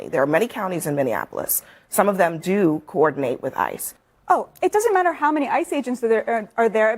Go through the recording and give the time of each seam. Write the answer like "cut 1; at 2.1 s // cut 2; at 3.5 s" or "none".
cut 1; at 3.9 s